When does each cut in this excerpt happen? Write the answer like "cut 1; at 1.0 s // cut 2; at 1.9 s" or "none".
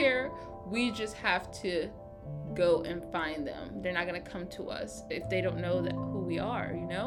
none